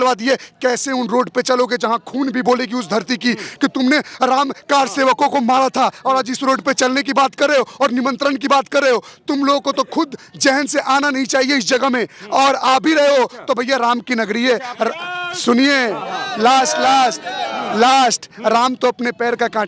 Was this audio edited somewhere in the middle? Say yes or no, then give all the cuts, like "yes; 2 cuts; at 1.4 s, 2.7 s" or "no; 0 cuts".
no; 0 cuts